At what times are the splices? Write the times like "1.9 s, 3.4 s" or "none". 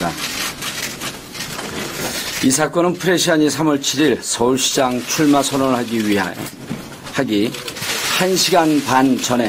6.4 s